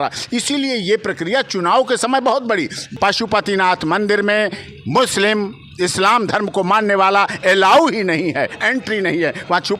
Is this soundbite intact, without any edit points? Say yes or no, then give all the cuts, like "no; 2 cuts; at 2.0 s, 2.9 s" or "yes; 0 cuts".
no; 1 cut; at 2.9 s